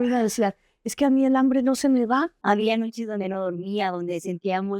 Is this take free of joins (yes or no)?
no